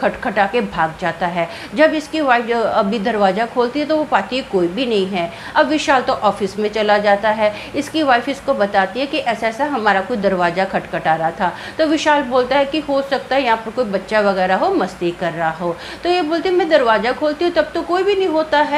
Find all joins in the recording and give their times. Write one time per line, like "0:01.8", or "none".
none